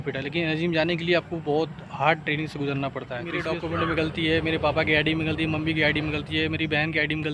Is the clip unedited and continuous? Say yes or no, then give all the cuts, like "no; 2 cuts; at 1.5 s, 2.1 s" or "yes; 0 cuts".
no; 1 cut; at 3.5 s